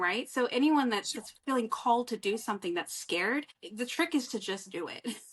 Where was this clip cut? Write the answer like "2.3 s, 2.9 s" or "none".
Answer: 3.6 s